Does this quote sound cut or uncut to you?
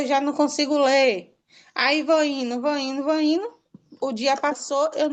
uncut